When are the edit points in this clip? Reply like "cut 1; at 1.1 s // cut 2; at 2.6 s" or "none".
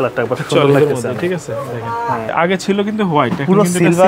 cut 1; at 2.3 s